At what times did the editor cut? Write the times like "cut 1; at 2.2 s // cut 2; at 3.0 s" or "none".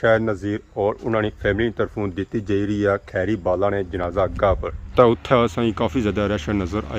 cut 1; at 4.8 s